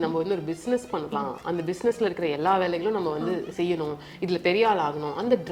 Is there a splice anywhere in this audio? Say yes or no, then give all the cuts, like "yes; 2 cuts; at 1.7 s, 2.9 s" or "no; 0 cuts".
no; 0 cuts